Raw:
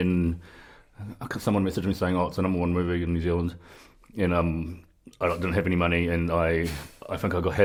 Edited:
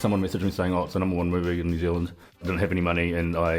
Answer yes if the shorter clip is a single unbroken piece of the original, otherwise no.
no